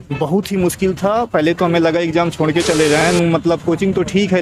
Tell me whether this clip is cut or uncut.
cut